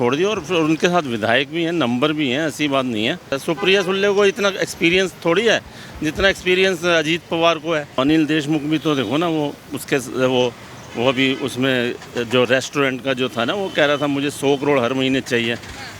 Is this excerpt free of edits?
no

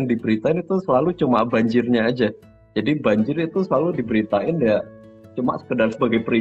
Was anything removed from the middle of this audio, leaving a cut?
no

